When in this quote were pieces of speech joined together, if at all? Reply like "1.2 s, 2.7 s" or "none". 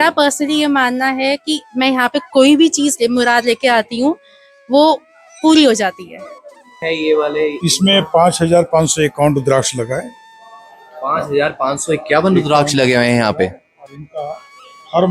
6.7 s